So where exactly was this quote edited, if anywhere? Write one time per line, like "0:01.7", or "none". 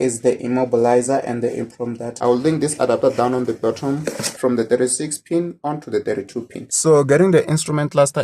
0:02.2
0:04.3
0:06.6